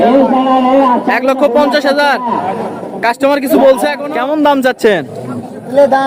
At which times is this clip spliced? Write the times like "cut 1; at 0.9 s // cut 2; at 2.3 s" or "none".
cut 1; at 4.0 s